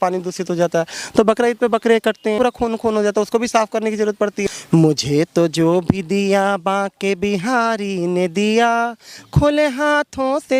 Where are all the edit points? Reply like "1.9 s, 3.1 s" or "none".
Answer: 2.4 s, 4.5 s